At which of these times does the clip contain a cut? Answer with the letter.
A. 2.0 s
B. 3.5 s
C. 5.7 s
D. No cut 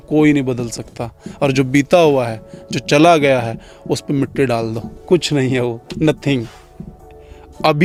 D